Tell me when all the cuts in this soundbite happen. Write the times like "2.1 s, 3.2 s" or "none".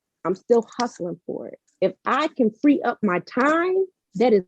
none